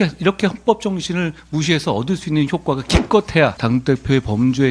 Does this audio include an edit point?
yes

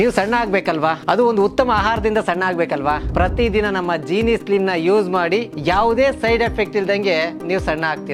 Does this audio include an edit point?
no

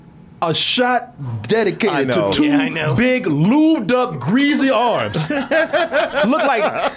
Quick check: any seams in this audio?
no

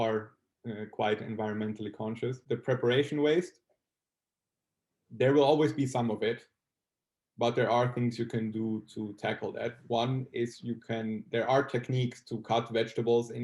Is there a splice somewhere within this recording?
yes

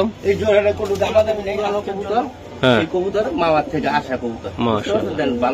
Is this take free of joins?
no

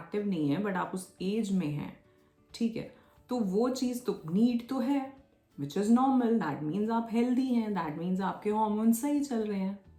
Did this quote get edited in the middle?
no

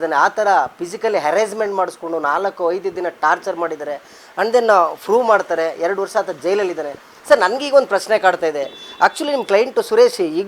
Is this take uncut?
yes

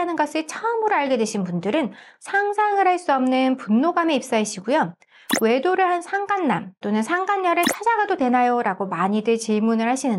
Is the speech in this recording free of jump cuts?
yes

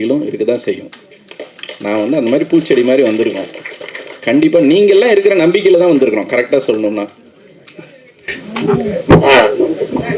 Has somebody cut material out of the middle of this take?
no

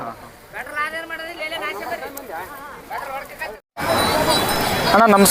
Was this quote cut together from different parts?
no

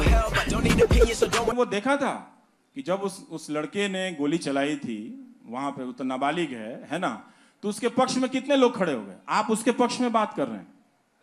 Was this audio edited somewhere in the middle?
yes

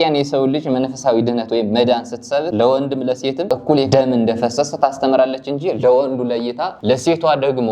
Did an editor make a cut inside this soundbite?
yes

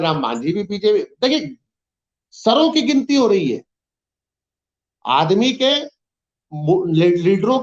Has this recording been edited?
no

